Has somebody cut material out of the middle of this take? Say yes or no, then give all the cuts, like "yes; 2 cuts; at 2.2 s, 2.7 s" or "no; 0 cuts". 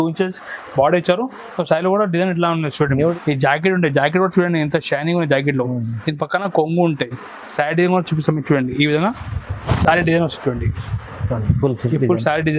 yes; 1 cut; at 3.1 s